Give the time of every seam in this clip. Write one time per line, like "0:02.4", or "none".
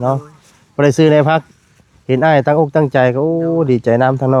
none